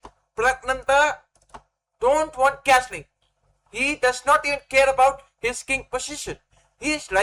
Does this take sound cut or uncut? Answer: uncut